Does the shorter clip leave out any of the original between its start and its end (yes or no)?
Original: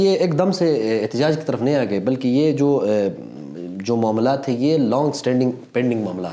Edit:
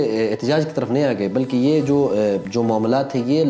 yes